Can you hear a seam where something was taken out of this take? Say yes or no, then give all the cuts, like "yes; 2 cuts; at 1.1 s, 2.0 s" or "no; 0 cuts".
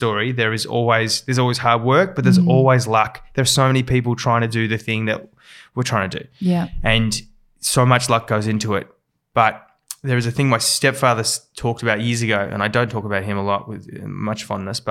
no; 0 cuts